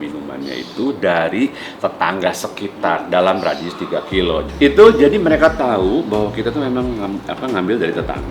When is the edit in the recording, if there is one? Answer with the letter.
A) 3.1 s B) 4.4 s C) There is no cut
B